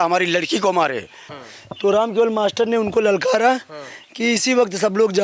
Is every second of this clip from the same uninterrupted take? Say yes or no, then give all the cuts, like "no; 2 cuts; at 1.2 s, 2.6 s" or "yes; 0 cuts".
no; 1 cut; at 1.3 s